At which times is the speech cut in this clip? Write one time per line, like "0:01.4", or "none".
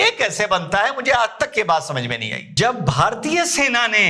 0:02.4